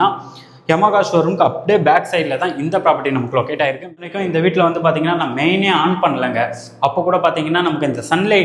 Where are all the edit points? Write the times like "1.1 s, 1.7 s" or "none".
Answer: 4.1 s